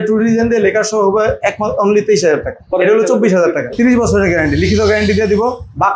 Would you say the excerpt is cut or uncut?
cut